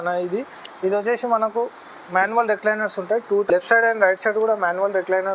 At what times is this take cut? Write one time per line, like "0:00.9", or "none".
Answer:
0:03.5